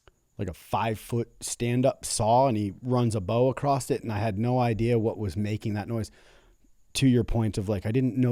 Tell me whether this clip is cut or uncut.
uncut